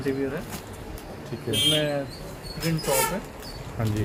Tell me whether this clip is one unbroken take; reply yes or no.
yes